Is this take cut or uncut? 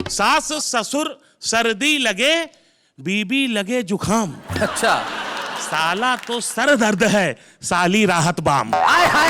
uncut